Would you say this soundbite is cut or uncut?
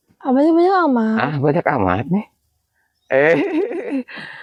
uncut